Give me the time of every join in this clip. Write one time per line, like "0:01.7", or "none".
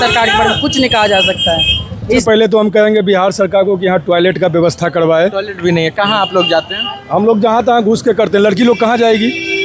none